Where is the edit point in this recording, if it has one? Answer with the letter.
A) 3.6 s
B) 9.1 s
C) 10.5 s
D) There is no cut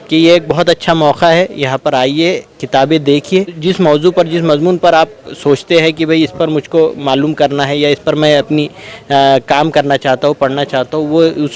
A